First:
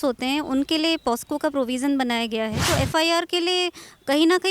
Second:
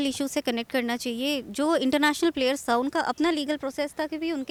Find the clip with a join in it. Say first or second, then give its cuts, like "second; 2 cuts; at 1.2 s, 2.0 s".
first; 1 cut; at 2.6 s